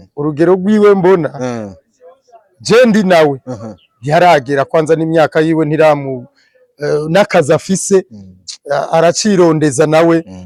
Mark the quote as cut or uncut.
uncut